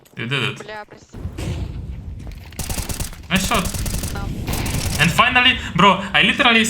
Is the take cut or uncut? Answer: cut